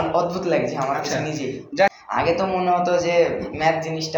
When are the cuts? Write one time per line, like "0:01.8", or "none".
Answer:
0:01.6